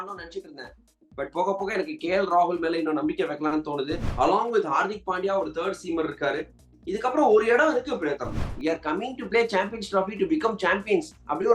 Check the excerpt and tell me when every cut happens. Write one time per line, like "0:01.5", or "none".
0:04.1
0:08.4